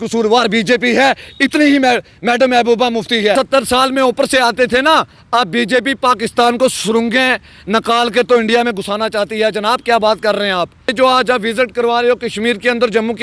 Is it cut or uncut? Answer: cut